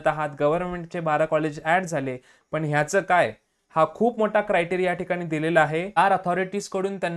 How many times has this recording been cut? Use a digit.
1